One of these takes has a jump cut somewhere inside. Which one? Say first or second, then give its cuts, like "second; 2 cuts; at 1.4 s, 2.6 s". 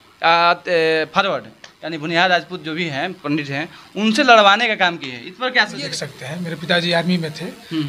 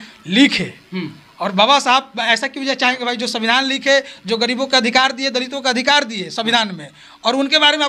first; 1 cut; at 5.8 s